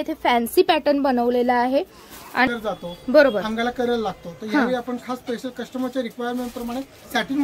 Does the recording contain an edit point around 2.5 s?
yes; 1 cut; at 2.5 s

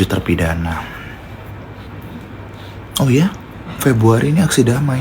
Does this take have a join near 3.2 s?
no; 1 cut; at 1.9 s

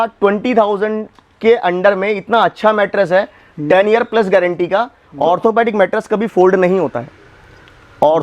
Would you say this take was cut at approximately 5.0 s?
yes; 1 cut; at 5.0 s

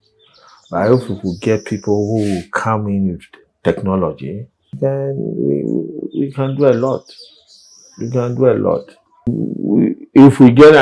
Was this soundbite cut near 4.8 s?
yes; 2 cuts; at 4.8 s, 9.5 s

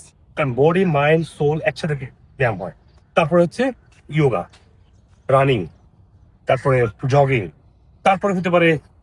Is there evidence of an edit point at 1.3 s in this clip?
no; 0 cuts

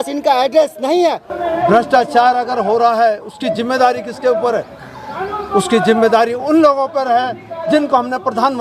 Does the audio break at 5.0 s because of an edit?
no; 1 cut; at 1.3 s

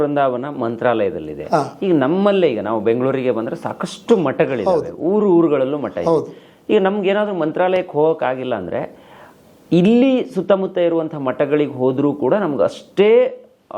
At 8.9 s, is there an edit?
no; 0 cuts

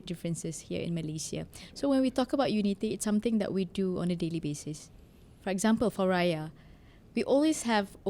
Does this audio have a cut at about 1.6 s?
no; 0 cuts

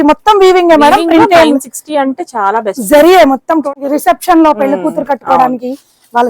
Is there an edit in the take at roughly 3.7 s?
yes; 1 cut; at 3.7 s

